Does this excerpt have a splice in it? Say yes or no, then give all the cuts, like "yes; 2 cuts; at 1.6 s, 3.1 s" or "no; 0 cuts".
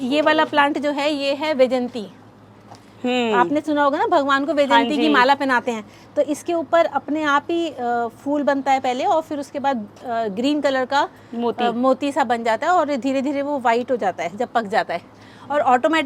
no; 0 cuts